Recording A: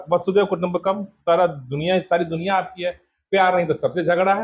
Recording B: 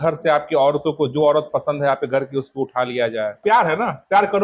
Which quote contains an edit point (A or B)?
B